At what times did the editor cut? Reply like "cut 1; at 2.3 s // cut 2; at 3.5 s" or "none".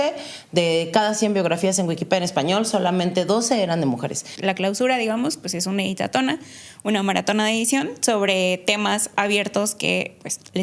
cut 1; at 4.3 s